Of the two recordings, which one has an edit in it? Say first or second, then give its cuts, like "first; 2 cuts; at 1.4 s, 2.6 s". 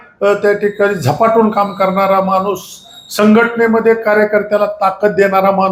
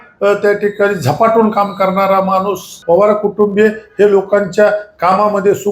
second; 1 cut; at 2.7 s